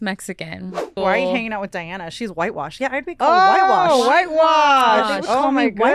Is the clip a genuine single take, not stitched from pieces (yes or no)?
no